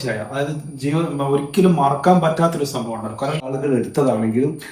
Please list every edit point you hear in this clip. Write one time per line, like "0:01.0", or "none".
0:03.5